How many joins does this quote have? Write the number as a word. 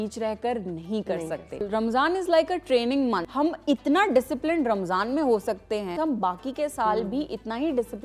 three